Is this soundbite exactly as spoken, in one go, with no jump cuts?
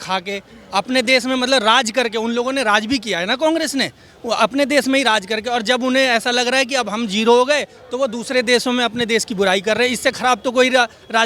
yes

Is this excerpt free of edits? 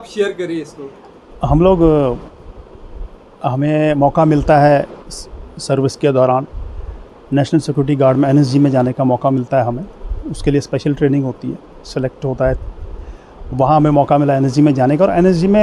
yes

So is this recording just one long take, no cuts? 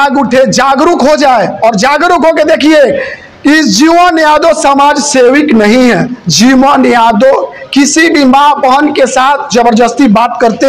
yes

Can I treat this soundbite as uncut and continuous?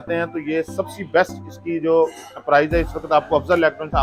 yes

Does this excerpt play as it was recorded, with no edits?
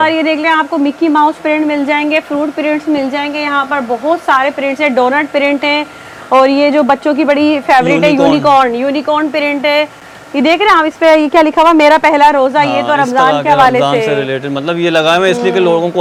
yes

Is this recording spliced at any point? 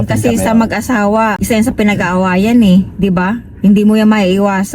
no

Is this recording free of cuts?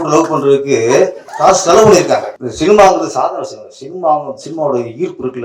no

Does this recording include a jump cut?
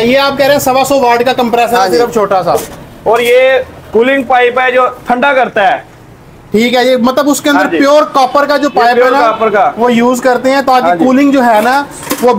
no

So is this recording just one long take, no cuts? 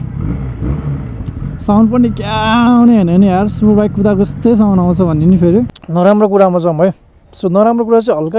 no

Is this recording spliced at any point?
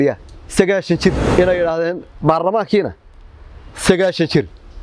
yes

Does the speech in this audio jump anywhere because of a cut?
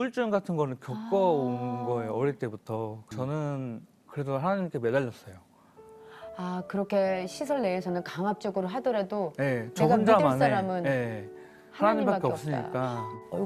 yes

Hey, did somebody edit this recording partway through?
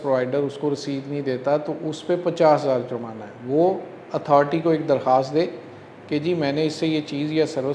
no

